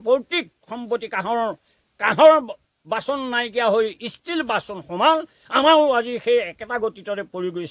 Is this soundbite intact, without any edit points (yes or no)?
yes